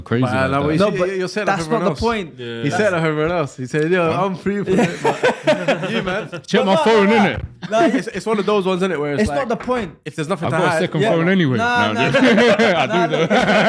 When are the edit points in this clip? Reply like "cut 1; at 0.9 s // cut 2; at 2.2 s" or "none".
none